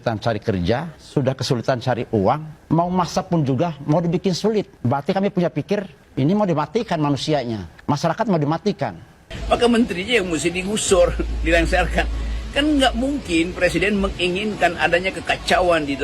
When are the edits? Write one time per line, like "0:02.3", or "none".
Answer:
0:01.0
0:02.5
0:04.7
0:06.0
0:07.7
0:09.3